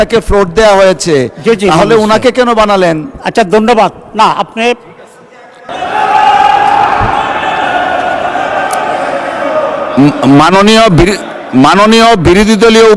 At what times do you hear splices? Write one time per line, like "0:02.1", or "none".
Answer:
0:05.7

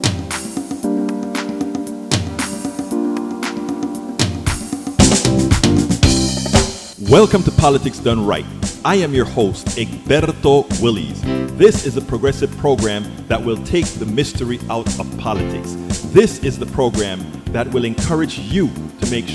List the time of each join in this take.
none

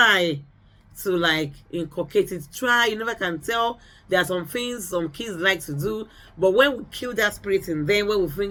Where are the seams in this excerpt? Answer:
none

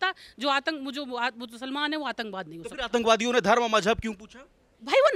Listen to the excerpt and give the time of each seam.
none

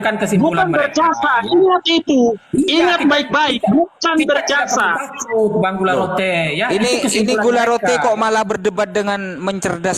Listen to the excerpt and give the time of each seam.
none

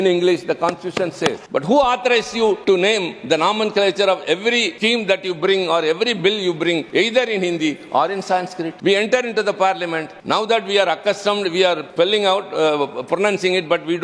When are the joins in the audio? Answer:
0:01.4
0:02.6
0:04.7
0:06.8
0:08.7
0:10.1
0:11.8

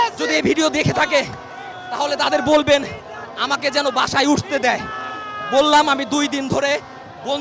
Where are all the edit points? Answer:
none

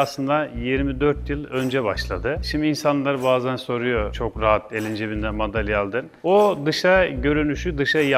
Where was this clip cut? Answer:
none

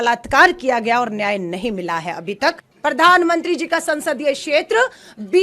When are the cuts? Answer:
0:02.7

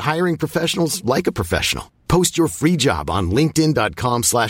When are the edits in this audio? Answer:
none

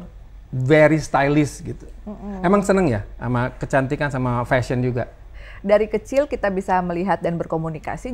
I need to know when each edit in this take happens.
0:05.4

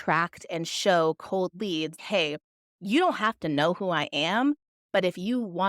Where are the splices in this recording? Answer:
0:02.0

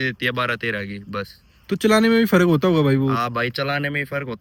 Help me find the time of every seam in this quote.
none

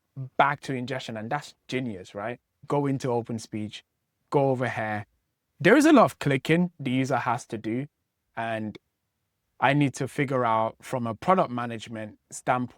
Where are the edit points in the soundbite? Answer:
0:02.6

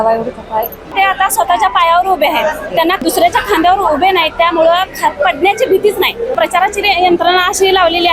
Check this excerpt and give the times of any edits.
0:00.9
0:03.0
0:06.3

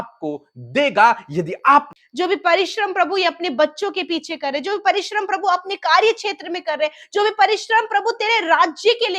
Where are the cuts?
0:02.0

